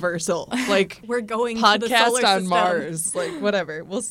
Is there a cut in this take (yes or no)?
yes